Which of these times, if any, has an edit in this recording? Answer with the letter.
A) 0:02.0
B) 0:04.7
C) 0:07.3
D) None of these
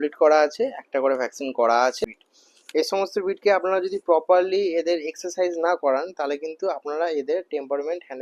A